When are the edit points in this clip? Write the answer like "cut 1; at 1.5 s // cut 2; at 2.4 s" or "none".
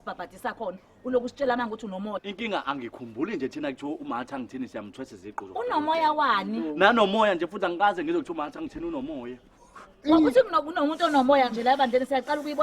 cut 1; at 2.2 s